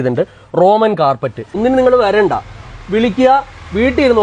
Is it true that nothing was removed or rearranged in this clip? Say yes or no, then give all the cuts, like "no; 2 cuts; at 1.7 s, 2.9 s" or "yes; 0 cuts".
no; 1 cut; at 1.5 s